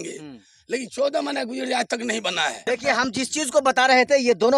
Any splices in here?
yes; 1 cut; at 2.6 s

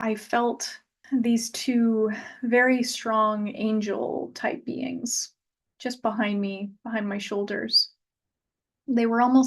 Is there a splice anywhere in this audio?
yes; 1 cut; at 1.0 s

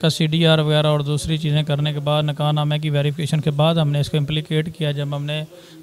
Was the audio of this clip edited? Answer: no; 0 cuts

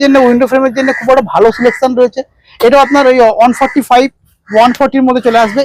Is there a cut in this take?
no; 0 cuts

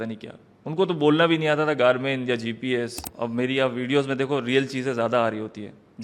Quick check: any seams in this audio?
yes; 1 cut; at 3.0 s

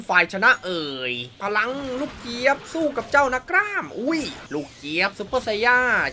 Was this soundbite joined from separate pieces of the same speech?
yes; 2 cuts; at 1.3 s, 4.4 s

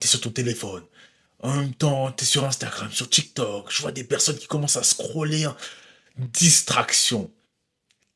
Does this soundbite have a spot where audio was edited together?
no; 0 cuts

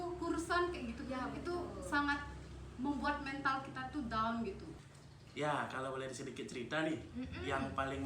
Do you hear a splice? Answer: yes; 1 cut; at 4.7 s

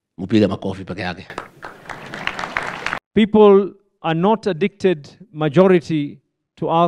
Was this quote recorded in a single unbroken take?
no; 1 cut; at 3.0 s

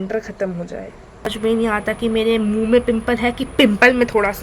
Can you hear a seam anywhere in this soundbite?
yes; 1 cut; at 1.3 s

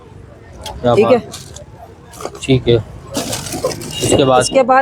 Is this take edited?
no; 0 cuts

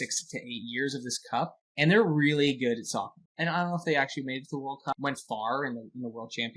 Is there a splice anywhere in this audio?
yes; 3 cuts; at 1.6 s, 3.2 s, 4.9 s

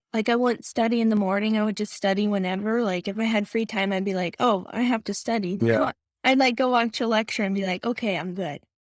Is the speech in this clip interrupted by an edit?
no; 0 cuts

